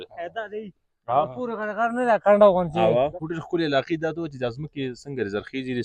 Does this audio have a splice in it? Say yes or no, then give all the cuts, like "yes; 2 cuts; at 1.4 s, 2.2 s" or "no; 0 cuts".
yes; 1 cut; at 3.2 s